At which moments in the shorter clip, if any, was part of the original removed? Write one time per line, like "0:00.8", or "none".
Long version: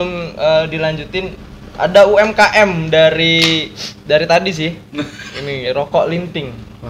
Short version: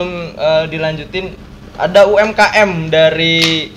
none